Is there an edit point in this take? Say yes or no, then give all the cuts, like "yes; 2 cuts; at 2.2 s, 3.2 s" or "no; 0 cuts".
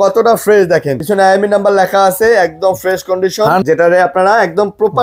yes; 2 cuts; at 1.0 s, 3.6 s